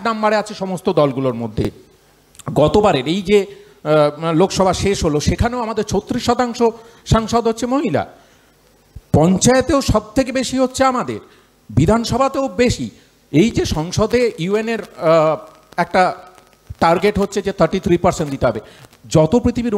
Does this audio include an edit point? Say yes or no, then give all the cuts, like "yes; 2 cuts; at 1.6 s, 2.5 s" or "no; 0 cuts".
no; 0 cuts